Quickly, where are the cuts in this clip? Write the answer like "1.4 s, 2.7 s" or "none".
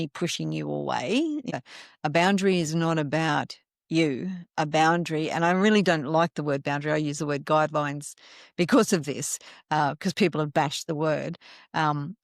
1.5 s